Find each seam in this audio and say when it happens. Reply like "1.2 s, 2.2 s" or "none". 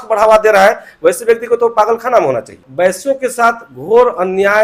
2.6 s